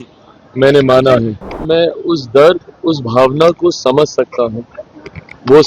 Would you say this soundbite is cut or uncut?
cut